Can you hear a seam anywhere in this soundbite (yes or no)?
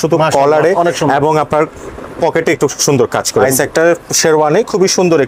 yes